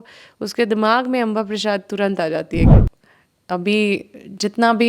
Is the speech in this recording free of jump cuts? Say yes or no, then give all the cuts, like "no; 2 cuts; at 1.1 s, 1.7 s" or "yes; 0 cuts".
no; 1 cut; at 2.7 s